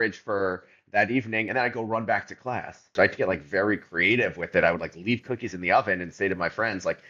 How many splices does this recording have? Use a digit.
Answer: 1